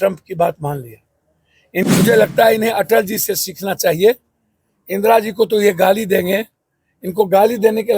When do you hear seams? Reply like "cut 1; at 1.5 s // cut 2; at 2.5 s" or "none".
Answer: cut 1; at 1.8 s